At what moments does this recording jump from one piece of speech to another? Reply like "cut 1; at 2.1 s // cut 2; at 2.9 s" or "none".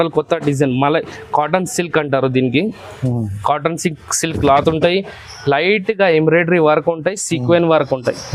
none